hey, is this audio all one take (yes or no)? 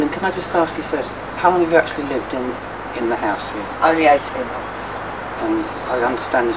yes